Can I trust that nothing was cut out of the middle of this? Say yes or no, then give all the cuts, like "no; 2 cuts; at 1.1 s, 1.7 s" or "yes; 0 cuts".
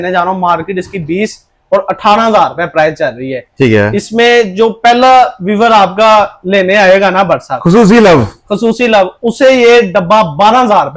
yes; 0 cuts